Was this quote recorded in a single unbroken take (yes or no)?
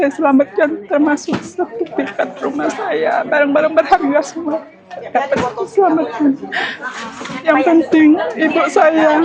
yes